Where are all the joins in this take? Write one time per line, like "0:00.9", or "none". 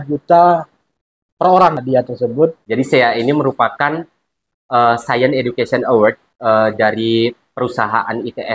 0:01.8
0:02.6
0:06.3